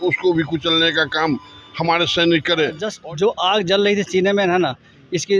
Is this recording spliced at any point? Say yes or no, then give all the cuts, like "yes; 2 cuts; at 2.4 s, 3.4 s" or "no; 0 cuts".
yes; 1 cut; at 2.9 s